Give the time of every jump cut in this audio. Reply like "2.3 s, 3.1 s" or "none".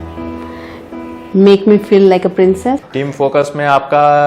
2.9 s